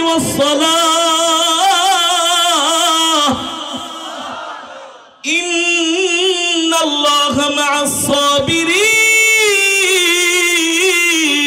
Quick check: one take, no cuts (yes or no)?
yes